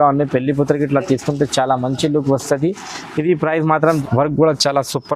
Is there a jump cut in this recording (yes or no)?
yes